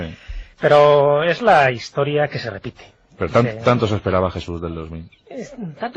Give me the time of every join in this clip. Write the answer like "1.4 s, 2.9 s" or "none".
1.9 s